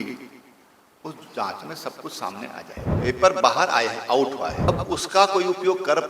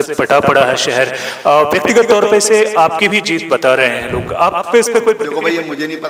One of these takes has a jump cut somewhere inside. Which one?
first; 2 cuts; at 2.9 s, 4.6 s

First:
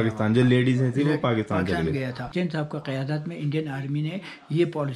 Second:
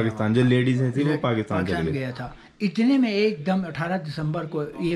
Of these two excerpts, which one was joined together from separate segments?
first; 1 cut; at 2.3 s

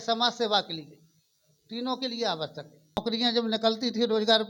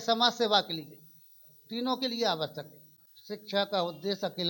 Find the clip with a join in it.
first; 1 cut; at 3.1 s

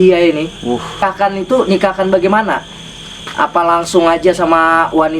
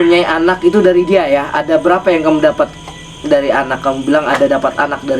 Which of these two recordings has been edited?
first; 1 cut; at 1.0 s

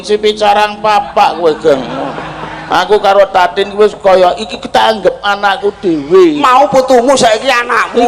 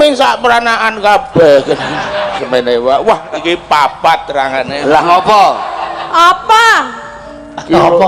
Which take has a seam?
second; 1 cut; at 2.4 s

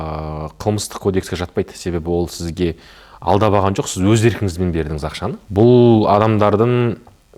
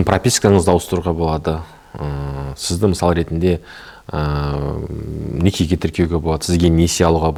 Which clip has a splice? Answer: first; 1 cut; at 5.3 s

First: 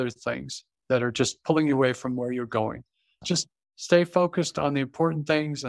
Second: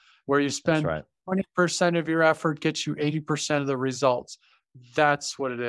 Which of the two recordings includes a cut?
first; 1 cut; at 3.2 s

